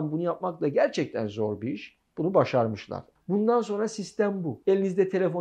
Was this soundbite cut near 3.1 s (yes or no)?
yes